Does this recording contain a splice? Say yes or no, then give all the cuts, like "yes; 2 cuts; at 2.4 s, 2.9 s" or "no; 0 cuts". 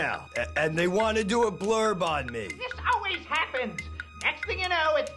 no; 0 cuts